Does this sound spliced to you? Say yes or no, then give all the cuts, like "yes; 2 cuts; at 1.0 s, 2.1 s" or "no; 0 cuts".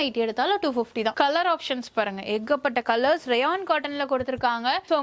no; 0 cuts